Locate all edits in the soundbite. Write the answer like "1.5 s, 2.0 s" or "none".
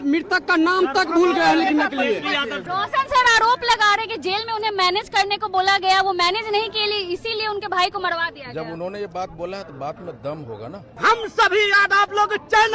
2.6 s, 10.9 s